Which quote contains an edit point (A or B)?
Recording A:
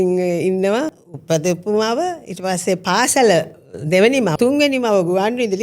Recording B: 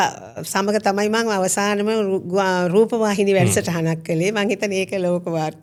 A